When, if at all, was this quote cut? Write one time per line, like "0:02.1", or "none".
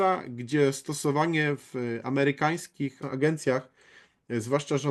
0:03.0